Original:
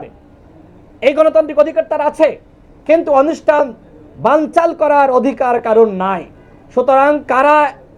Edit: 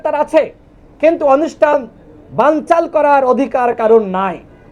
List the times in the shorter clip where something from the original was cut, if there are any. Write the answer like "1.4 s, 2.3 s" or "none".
none